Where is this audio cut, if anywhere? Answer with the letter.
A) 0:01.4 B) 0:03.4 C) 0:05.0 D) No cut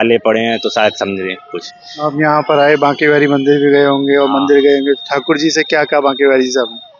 D